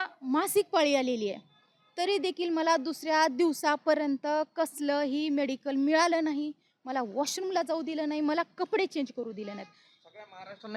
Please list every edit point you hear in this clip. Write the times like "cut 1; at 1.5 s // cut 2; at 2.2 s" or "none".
none